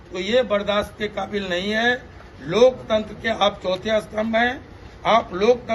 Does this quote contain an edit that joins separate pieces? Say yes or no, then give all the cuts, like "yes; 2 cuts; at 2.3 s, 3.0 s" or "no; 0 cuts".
no; 0 cuts